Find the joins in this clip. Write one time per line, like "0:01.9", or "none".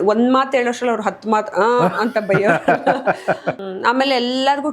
0:03.7